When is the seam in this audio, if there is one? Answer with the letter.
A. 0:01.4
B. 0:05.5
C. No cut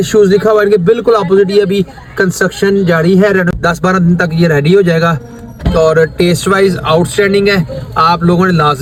C